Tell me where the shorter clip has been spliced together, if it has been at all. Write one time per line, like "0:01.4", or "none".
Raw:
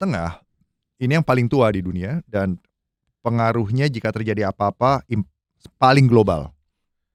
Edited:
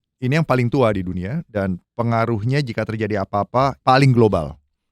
0:01.9
0:03.8